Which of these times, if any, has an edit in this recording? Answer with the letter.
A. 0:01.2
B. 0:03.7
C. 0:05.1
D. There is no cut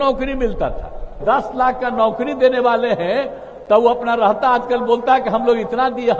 A